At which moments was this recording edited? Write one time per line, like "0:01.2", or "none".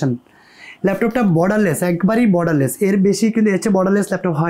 none